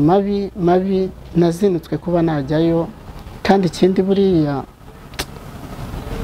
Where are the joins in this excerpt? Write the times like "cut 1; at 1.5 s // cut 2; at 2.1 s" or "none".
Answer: none